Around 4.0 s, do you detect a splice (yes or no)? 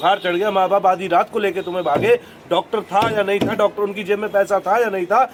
no